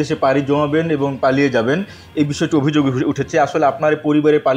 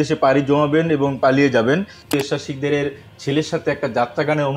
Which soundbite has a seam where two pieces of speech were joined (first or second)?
second